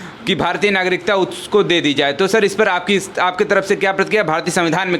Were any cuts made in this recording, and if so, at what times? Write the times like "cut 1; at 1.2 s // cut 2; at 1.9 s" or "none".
none